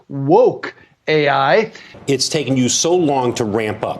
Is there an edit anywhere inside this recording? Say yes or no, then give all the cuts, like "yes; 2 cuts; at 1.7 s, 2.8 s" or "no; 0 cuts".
yes; 1 cut; at 1.9 s